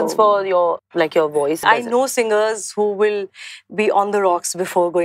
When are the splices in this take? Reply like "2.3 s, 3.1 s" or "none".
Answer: 0.8 s, 1.6 s